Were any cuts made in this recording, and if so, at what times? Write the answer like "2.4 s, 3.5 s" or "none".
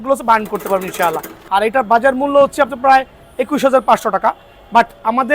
1.4 s

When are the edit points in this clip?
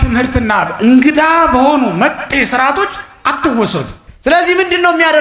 4.0 s

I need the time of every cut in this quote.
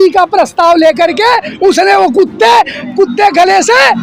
2.8 s

